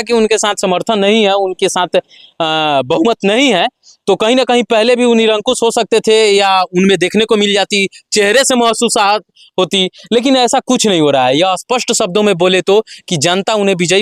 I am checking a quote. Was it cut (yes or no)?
no